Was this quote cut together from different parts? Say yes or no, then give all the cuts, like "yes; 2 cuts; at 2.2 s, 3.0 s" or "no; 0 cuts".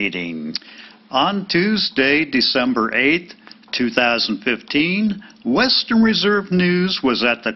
yes; 1 cut; at 0.9 s